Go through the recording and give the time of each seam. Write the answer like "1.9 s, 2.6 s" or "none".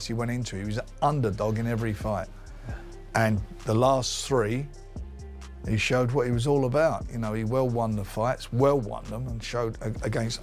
none